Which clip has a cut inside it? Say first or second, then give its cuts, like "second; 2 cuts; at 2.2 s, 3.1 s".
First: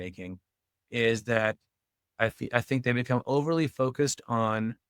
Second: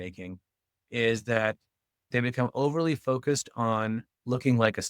second; 1 cut; at 2.1 s